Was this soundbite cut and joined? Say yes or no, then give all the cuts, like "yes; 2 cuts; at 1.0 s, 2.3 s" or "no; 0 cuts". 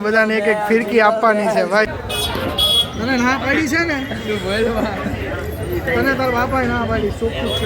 yes; 1 cut; at 1.9 s